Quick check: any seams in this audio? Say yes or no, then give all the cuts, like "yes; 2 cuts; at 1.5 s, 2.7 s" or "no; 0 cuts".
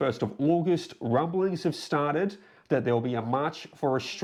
no; 0 cuts